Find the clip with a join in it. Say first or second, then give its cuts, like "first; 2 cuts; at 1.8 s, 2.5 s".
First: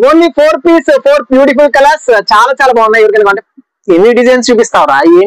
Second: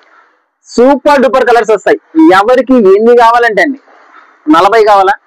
first; 1 cut; at 3.4 s